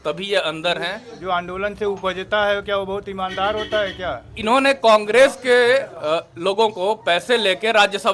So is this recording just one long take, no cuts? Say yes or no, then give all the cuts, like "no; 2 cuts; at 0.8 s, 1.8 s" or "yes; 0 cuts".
no; 2 cuts; at 1.2 s, 4.3 s